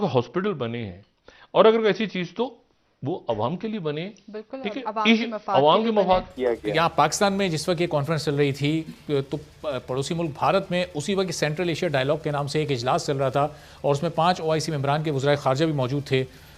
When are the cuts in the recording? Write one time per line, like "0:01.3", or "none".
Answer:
0:06.3